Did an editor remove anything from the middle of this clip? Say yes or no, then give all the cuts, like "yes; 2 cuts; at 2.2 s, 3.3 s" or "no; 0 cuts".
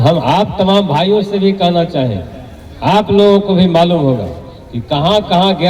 no; 0 cuts